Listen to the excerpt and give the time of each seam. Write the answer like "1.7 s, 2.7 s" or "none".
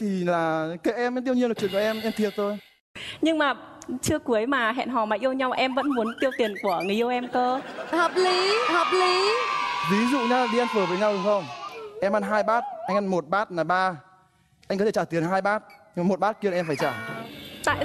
none